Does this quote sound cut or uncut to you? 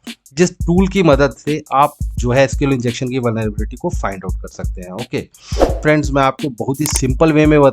cut